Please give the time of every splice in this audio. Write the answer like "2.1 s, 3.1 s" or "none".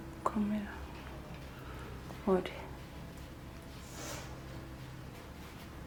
none